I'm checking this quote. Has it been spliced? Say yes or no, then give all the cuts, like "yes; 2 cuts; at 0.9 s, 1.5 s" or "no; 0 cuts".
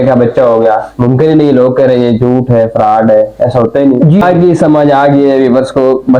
yes; 1 cut; at 4.2 s